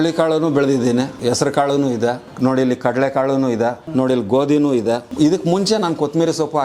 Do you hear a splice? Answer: yes; 4 cuts; at 1.1 s, 2.3 s, 3.8 s, 5.1 s

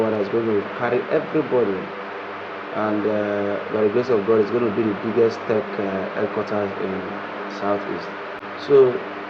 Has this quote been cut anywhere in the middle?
no; 0 cuts

